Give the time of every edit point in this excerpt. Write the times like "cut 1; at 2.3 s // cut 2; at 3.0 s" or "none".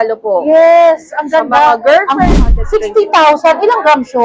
cut 1; at 2.3 s